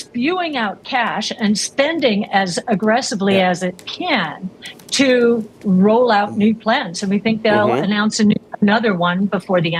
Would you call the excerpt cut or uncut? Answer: uncut